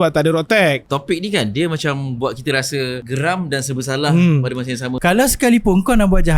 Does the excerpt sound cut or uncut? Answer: cut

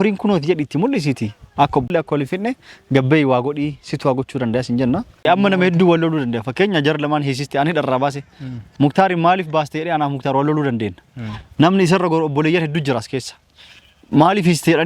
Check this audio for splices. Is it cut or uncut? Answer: cut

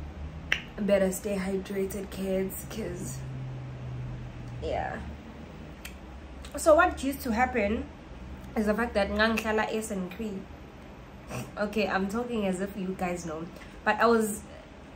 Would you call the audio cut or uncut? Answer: cut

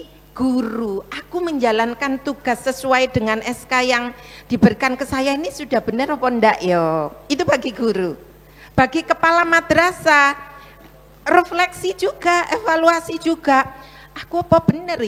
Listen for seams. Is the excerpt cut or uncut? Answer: uncut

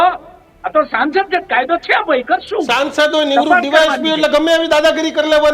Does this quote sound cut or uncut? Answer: uncut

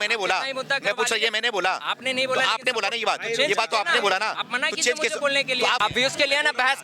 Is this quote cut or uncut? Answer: cut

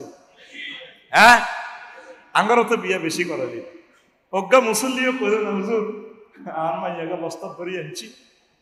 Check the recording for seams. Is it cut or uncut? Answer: uncut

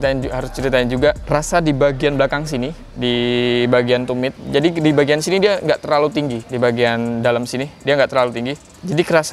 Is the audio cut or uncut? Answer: uncut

